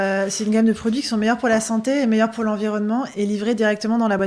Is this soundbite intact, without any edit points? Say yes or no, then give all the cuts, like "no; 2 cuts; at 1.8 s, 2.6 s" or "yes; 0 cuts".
yes; 0 cuts